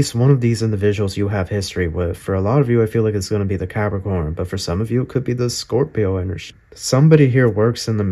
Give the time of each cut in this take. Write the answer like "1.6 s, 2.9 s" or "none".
6.4 s